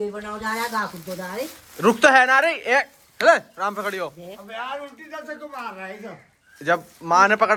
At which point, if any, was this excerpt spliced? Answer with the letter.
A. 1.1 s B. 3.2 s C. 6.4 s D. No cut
D